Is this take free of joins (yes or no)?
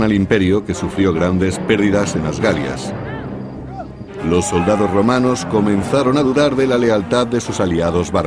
no